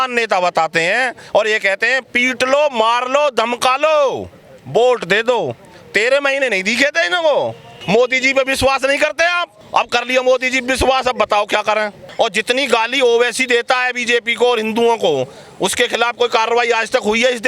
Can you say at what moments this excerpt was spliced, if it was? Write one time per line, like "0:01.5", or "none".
0:07.7
0:09.5
0:12.0